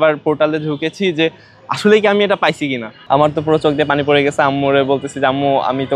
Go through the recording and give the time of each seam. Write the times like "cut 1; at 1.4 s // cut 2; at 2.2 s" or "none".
cut 1; at 2.9 s